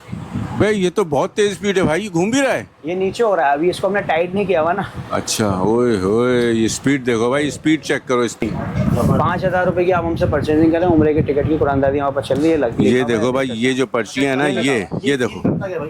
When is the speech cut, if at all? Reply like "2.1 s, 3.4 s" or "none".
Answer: 8.4 s